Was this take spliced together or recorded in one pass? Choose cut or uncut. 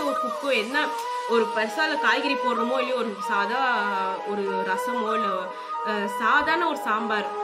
uncut